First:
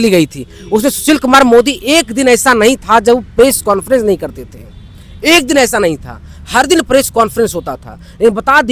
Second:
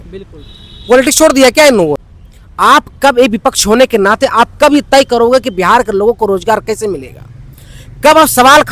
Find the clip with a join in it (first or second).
second